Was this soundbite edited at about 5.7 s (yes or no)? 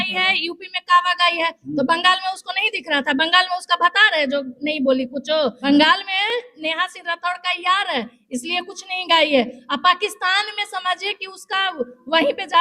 yes